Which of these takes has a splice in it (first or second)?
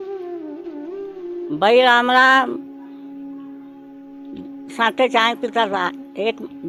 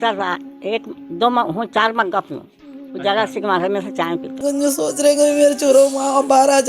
second